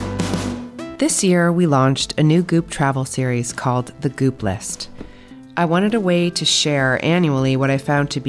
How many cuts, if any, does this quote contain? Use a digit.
1